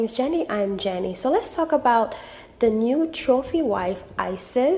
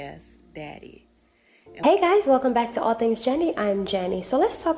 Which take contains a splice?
second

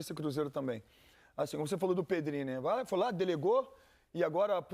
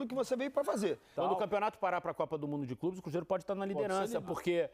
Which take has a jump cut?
second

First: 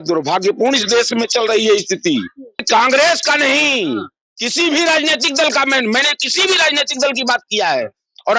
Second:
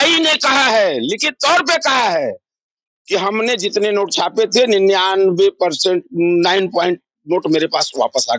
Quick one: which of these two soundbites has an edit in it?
first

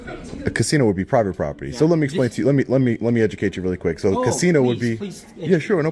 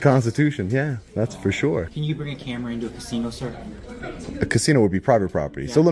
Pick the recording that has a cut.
second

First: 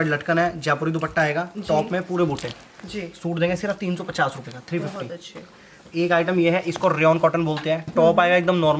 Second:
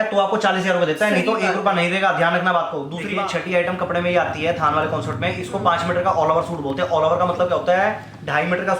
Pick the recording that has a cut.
second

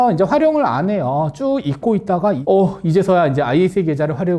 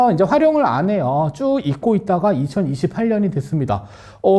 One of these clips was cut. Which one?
first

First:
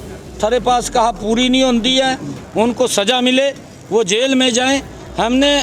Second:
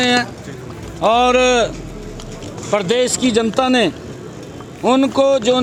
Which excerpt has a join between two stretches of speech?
first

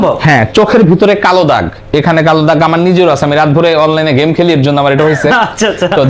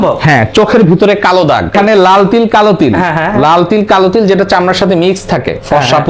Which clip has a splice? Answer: second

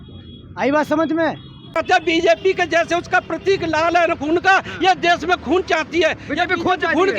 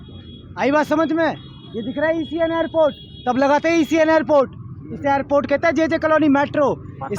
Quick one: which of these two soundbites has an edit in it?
first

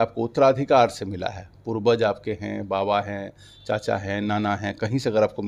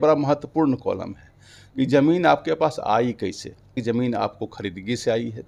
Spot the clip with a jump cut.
second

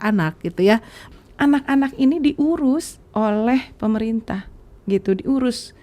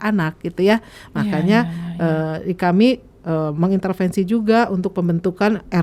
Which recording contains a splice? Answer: first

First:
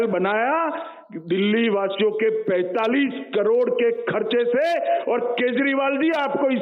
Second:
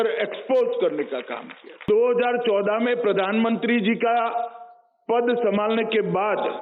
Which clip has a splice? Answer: second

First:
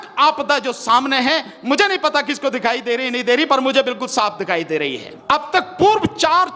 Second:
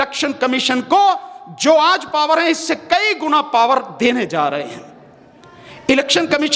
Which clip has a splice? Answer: first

